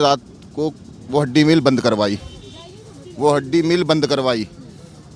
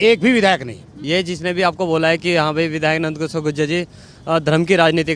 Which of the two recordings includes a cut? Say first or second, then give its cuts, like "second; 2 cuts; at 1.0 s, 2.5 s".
second; 1 cut; at 1.0 s